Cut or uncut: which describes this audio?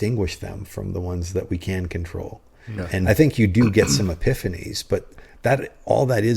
cut